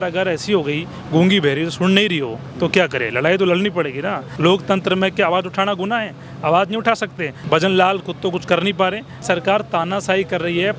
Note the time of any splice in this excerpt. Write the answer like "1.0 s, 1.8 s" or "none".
4.2 s, 7.3 s, 9.2 s

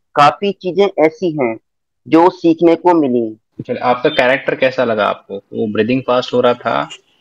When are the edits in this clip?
3.4 s

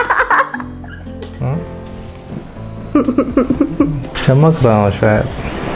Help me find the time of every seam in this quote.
4.1 s

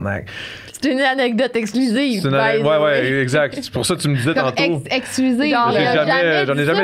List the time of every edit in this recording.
none

